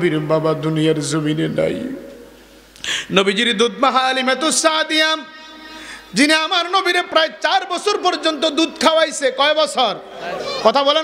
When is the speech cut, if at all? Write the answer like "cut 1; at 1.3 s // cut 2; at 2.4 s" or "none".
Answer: none